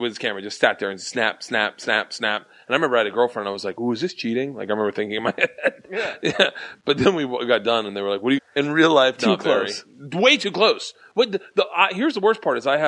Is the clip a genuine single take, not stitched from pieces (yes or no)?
yes